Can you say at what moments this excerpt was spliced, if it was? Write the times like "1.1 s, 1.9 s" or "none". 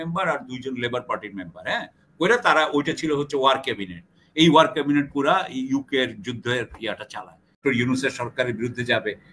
7.6 s

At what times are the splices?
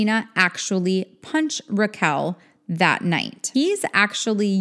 3.5 s

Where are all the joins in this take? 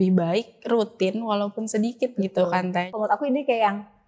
2.9 s

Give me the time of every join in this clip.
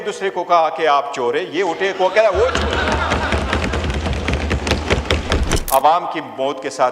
5.5 s

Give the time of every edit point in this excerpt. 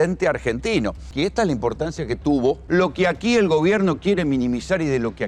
1.1 s, 2.6 s

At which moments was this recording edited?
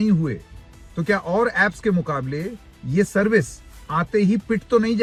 none

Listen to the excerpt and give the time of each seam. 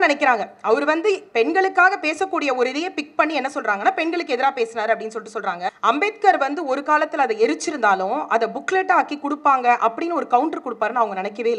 5.7 s

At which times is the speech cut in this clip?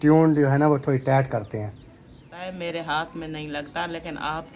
2.4 s

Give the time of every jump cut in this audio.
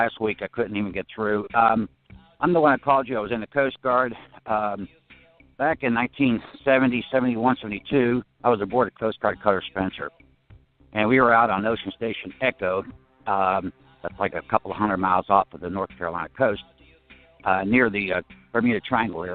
10.3 s

